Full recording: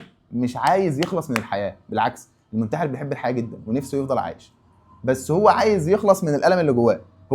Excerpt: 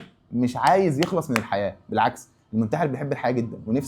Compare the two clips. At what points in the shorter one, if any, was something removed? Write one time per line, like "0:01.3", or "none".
none